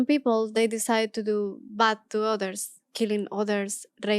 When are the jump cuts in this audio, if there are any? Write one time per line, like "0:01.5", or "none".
none